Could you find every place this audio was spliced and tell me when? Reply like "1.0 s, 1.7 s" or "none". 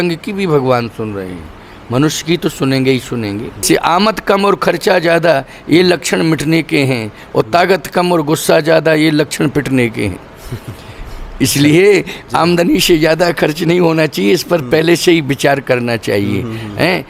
3.6 s